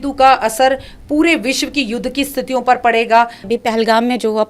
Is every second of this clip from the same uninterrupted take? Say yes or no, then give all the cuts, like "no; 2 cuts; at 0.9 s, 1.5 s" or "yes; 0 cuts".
no; 1 cut; at 3.4 s